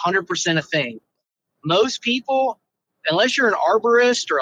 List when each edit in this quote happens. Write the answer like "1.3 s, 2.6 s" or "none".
1.0 s